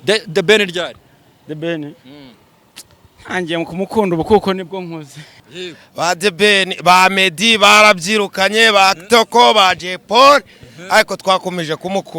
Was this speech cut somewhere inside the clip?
yes; 1 cut; at 5.5 s

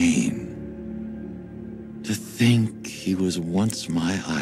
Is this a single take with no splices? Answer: yes; 0 cuts

